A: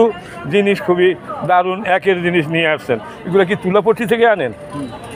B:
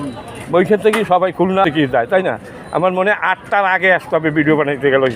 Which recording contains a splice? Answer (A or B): B